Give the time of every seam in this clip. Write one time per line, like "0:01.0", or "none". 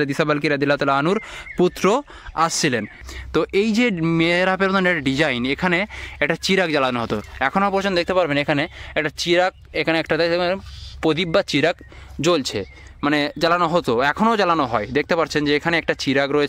0:03.0